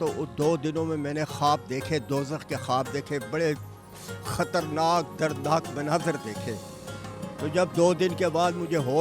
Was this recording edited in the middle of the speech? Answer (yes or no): no